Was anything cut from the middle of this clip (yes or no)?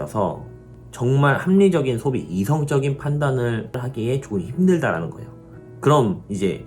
yes